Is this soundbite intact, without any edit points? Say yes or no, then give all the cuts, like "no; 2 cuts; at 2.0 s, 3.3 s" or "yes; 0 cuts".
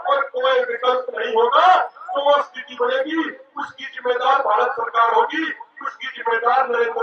yes; 0 cuts